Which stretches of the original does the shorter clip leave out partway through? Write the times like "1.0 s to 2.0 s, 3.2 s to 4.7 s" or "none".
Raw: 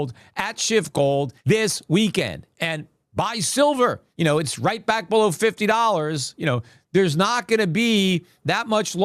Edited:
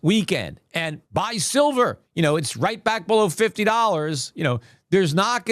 2.8 s to 3.0 s